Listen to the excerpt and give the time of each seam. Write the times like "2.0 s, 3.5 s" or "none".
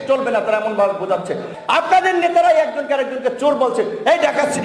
1.5 s